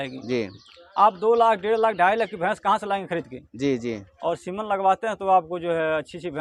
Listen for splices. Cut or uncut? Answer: uncut